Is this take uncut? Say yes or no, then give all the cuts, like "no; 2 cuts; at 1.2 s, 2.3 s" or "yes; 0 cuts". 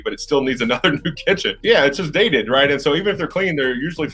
no; 1 cut; at 1.5 s